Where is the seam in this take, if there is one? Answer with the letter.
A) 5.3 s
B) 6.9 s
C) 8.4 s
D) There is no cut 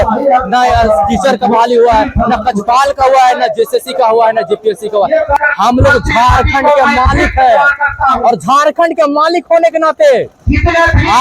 A